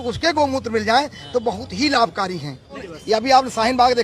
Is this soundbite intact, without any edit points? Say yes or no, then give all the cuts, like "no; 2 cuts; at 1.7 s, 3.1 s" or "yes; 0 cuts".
no; 1 cut; at 2.9 s